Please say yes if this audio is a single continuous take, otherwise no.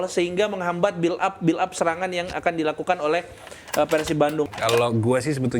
no